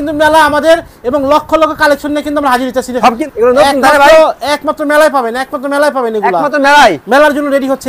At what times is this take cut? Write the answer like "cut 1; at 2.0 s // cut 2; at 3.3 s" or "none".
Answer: cut 1; at 3.2 s